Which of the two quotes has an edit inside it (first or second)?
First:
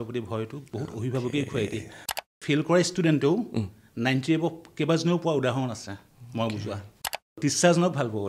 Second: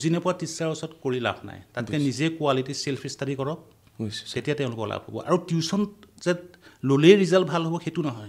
first